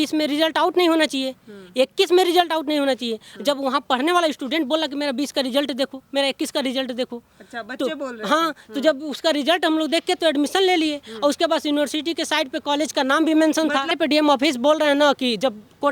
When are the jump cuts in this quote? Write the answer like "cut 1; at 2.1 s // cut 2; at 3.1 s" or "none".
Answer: cut 1; at 13.9 s

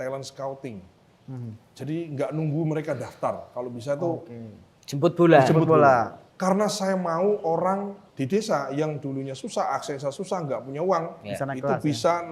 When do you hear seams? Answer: cut 1; at 6.2 s // cut 2; at 8.0 s

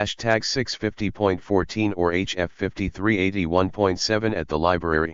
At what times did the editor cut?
none

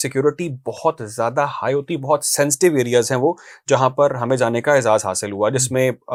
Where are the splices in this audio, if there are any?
none

